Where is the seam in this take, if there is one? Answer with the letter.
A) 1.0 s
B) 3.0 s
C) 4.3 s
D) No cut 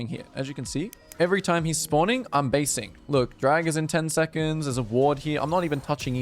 A